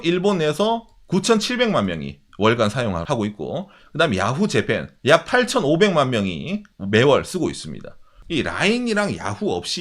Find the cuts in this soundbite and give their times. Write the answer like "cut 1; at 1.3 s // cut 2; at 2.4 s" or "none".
cut 1; at 3.0 s // cut 2; at 4.9 s // cut 3; at 8.2 s